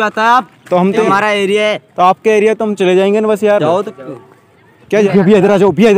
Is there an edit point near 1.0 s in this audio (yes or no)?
yes